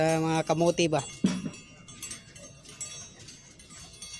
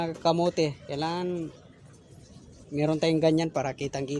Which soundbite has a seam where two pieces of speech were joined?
first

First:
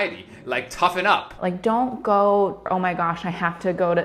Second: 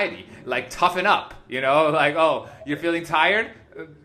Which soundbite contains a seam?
first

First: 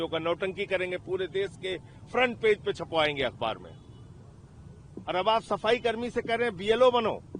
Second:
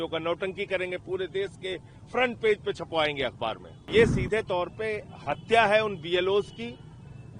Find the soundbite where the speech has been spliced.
second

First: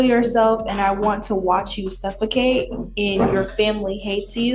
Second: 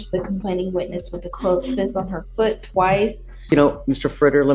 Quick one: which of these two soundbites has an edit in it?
second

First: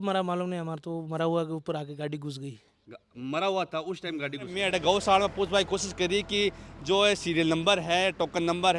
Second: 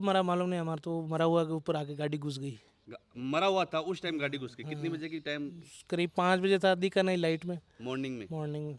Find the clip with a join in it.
first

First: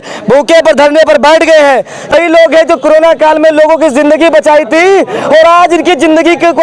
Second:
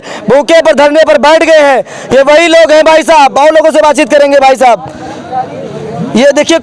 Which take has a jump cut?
first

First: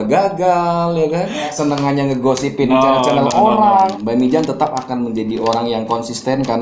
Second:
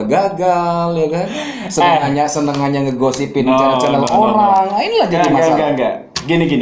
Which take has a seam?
first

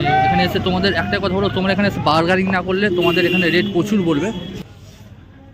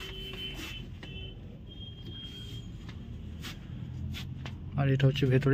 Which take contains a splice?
first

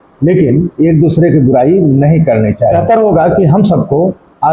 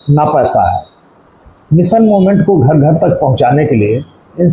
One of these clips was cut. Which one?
first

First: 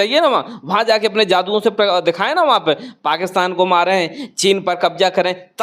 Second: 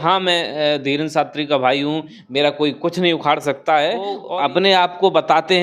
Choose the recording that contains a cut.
second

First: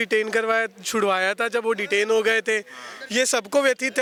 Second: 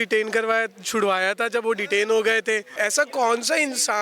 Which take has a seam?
second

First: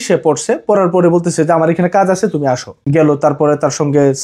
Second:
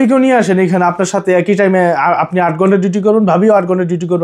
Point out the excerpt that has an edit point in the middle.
first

